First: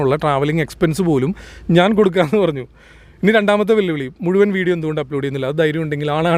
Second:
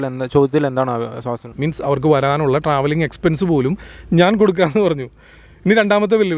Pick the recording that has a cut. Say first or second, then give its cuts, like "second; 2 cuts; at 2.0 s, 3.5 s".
second; 1 cut; at 1.5 s